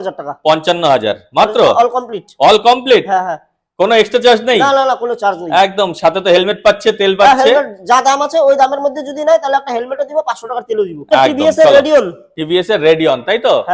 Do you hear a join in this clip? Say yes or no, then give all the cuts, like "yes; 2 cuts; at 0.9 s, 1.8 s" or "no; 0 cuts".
no; 0 cuts